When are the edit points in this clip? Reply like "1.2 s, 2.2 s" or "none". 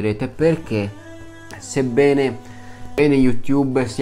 3.0 s